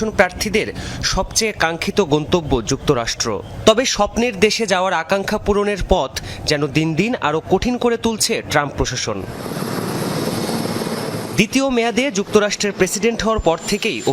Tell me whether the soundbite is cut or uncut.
uncut